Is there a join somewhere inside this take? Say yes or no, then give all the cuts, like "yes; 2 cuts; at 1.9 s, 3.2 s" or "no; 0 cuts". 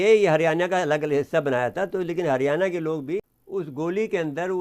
yes; 1 cut; at 3.2 s